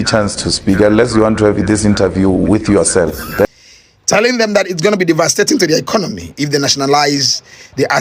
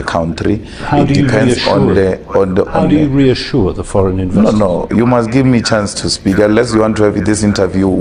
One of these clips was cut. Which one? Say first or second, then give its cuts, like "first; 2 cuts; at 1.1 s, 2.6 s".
first; 1 cut; at 3.5 s